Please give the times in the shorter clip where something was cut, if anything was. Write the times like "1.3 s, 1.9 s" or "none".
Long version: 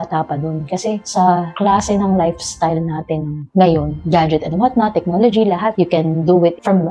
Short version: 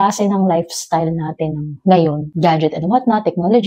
none